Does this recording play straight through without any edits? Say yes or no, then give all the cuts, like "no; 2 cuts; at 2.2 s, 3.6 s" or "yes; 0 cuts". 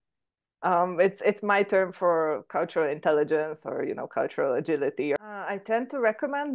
no; 1 cut; at 5.2 s